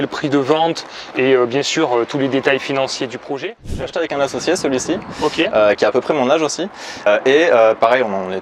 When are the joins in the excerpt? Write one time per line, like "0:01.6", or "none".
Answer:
0:03.8
0:07.1